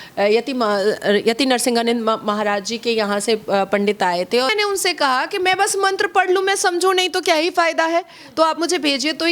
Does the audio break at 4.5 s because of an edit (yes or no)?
yes